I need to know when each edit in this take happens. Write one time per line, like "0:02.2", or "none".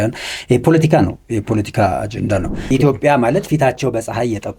0:02.6